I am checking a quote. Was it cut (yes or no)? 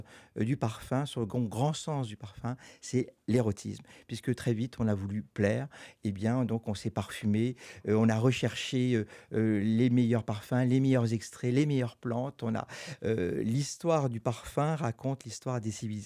no